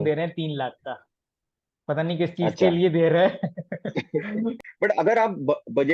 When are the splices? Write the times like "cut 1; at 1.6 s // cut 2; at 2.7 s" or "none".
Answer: cut 1; at 4.6 s